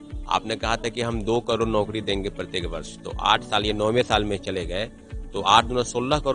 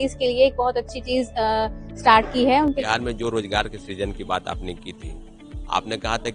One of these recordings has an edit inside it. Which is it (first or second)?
second